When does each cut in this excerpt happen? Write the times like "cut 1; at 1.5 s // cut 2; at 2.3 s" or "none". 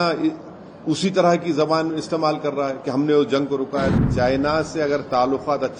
cut 1; at 3.9 s